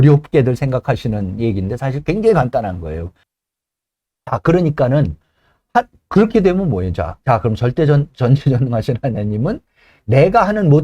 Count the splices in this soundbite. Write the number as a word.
one